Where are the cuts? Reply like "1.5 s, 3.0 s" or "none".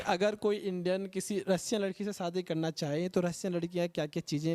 none